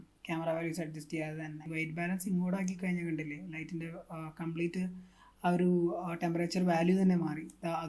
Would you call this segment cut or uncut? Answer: cut